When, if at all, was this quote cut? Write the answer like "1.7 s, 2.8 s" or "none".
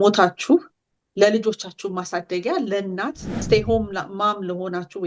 3.4 s